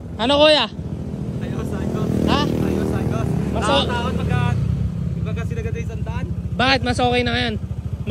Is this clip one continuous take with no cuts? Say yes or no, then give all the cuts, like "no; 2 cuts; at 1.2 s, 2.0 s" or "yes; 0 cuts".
yes; 0 cuts